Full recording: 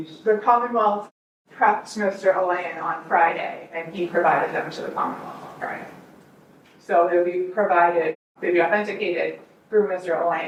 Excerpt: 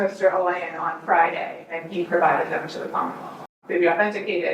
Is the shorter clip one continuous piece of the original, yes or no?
no